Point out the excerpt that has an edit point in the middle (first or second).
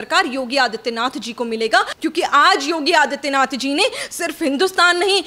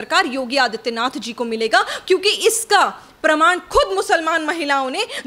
first